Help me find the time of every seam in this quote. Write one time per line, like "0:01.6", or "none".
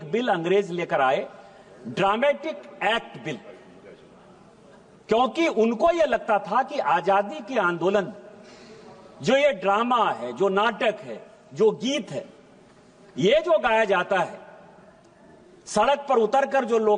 none